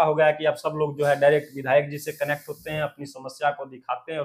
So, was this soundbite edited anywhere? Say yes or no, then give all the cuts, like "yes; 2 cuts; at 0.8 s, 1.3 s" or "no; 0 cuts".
no; 0 cuts